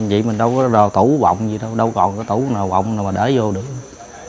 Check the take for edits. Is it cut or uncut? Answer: uncut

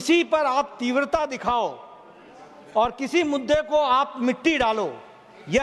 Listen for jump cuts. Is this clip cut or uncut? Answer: uncut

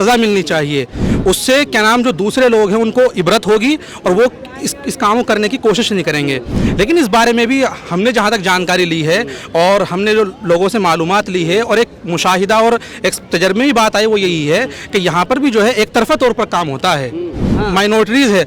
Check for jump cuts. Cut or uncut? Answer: cut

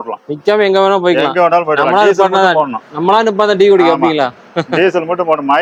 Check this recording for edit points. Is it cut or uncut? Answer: uncut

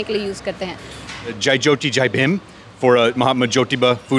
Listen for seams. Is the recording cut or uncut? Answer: cut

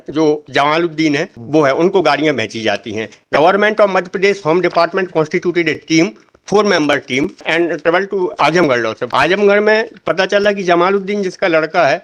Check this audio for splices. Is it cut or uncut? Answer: cut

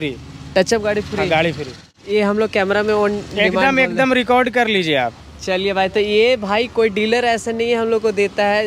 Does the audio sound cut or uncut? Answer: uncut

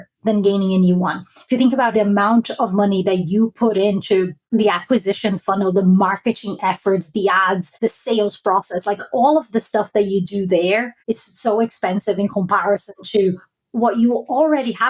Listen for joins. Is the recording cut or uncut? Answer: cut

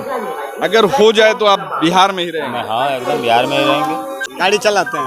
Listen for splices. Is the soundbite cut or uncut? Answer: cut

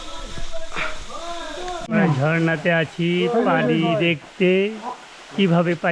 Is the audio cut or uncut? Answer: cut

